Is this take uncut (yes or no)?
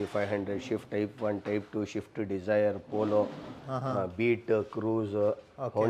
yes